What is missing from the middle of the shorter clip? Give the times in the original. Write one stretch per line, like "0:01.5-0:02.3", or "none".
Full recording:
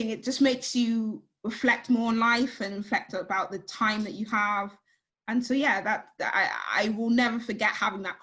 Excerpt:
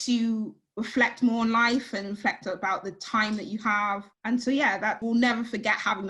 0:04.8-0:05.1
0:06.0-0:07.0